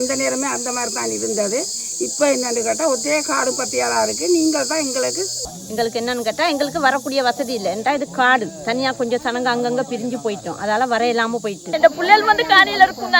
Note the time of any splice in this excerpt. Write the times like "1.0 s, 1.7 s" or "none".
5.4 s, 11.6 s